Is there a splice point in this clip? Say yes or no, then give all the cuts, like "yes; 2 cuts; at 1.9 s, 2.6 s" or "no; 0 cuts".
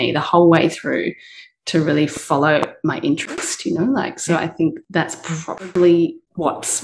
no; 0 cuts